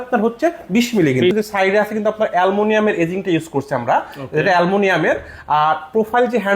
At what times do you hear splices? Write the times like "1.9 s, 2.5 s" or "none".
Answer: 1.3 s